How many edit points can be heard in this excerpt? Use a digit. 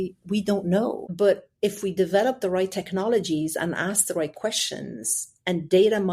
1